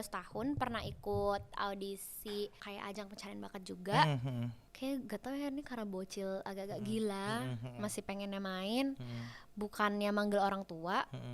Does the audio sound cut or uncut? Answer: cut